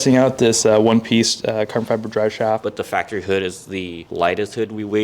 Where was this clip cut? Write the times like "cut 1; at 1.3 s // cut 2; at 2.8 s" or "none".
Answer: cut 1; at 2.7 s // cut 2; at 4.0 s